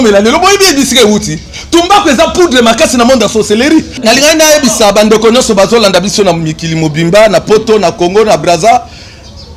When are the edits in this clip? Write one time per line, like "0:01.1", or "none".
0:03.9